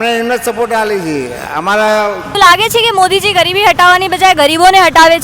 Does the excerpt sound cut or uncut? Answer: cut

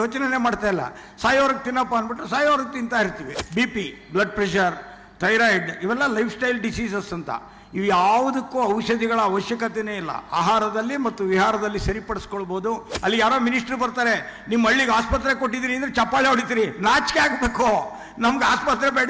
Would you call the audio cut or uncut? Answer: cut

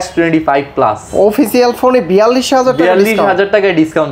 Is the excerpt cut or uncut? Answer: uncut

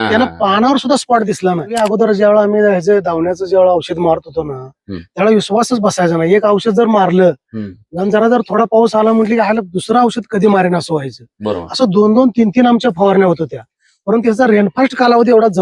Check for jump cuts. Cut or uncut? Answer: cut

